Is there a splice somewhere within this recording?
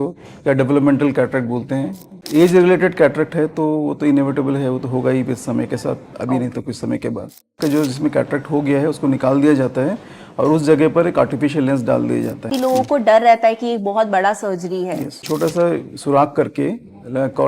yes; 4 cuts; at 2.2 s, 7.6 s, 12.5 s, 15.2 s

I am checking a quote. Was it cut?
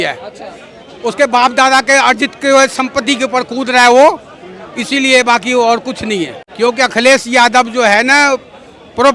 yes; 1 cut; at 6.4 s

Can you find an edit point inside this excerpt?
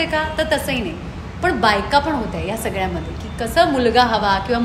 no; 0 cuts

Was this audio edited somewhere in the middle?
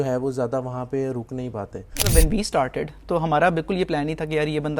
yes; 1 cut; at 2.1 s

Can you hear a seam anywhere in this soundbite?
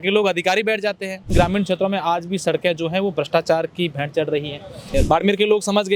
yes; 2 cuts; at 1.3 s, 4.9 s

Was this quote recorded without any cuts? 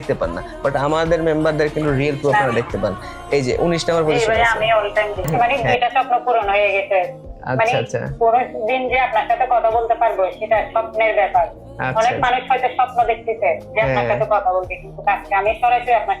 no; 1 cut; at 5.3 s

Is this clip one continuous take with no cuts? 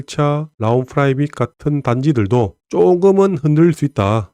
yes; 0 cuts

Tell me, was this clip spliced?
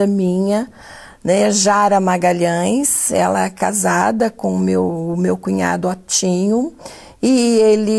yes; 1 cut; at 3.0 s

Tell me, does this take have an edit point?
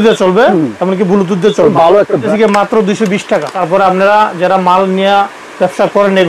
yes; 2 cuts; at 2.3 s, 3.5 s

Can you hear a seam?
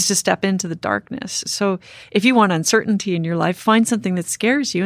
no; 0 cuts

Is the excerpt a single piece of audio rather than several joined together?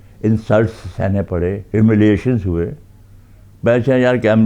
yes; 0 cuts

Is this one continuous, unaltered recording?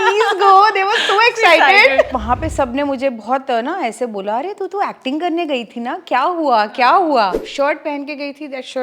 no; 2 cuts; at 2.2 s, 7.4 s

